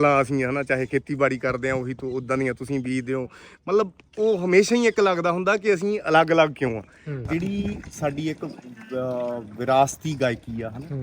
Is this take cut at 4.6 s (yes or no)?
no